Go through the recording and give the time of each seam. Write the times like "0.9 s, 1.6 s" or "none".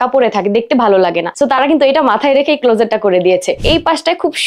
1.3 s, 3.5 s